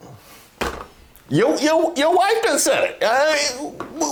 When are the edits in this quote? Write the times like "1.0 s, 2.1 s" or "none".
none